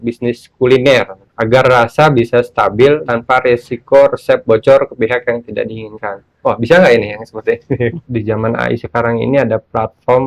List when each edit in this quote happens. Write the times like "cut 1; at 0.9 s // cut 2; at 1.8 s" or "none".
cut 1; at 1.2 s // cut 2; at 3.0 s // cut 3; at 8.0 s